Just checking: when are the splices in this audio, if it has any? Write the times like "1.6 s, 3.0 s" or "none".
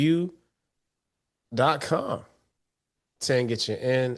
none